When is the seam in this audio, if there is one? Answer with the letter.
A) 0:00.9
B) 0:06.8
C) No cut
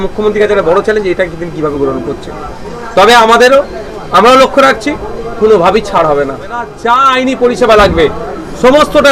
B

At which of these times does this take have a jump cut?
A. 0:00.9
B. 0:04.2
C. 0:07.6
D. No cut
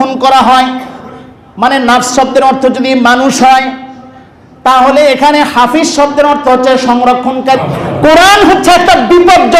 C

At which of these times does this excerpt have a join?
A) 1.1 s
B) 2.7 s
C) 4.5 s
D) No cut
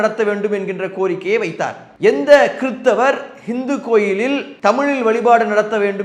C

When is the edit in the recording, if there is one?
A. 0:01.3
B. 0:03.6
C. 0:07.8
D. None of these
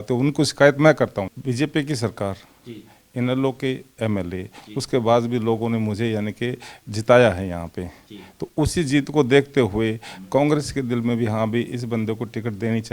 A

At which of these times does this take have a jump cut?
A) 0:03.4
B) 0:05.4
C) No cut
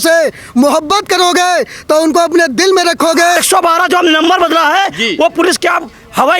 A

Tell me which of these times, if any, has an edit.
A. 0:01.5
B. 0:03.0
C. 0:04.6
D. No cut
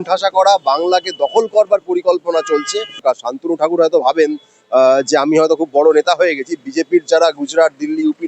B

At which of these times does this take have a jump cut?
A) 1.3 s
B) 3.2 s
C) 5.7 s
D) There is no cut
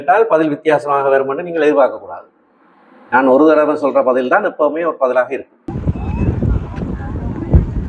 C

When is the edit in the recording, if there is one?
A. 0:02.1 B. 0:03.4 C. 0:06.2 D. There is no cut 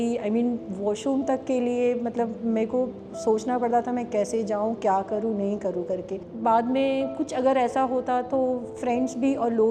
C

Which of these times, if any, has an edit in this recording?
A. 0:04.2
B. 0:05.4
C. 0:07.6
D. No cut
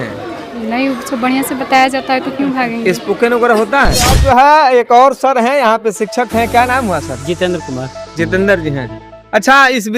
A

